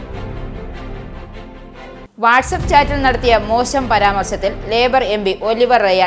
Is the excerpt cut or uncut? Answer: uncut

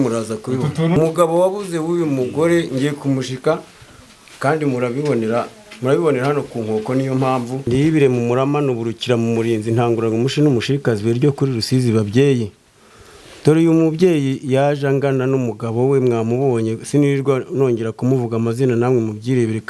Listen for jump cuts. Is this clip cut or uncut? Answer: cut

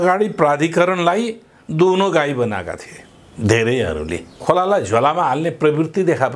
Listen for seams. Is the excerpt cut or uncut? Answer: cut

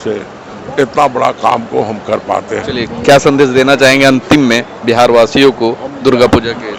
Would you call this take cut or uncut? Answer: uncut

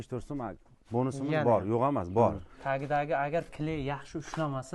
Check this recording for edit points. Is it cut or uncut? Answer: cut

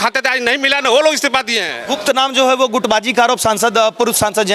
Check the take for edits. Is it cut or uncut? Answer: uncut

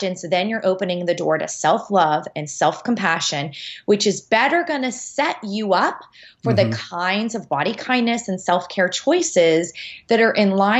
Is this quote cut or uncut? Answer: uncut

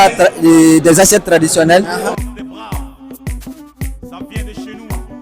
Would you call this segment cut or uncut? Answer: cut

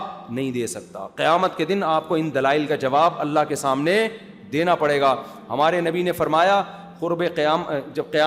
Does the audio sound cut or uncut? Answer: uncut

